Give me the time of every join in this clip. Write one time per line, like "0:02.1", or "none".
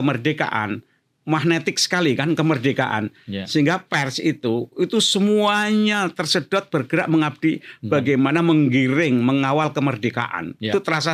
none